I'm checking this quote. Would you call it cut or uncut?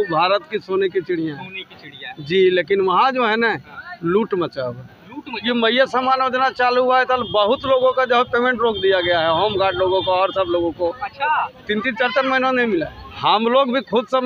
cut